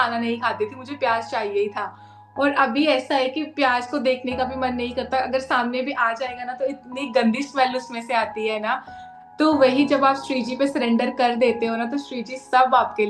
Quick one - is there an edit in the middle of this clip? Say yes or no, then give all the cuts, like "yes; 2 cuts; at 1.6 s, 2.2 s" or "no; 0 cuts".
no; 0 cuts